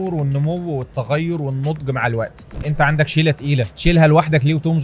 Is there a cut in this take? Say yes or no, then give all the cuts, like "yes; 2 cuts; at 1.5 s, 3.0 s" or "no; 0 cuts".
yes; 2 cuts; at 2.5 s, 3.7 s